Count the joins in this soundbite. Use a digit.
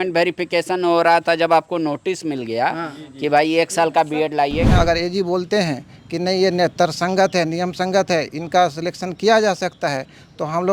1